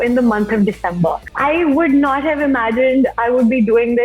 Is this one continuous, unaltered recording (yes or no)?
no